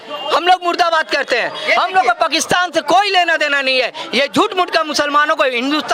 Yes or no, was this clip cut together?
no